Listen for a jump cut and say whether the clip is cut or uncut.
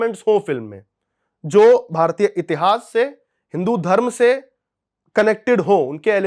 uncut